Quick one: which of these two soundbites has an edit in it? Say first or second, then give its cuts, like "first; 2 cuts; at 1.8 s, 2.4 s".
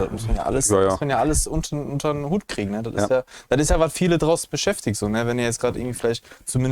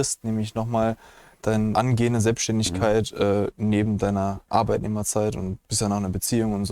second; 3 cuts; at 1.7 s, 4.4 s, 5.7 s